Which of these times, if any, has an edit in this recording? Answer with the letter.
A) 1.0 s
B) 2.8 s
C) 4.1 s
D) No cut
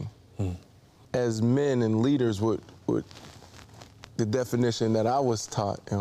A